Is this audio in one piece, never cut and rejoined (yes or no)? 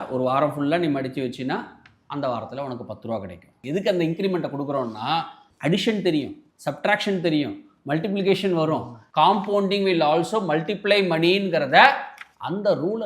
no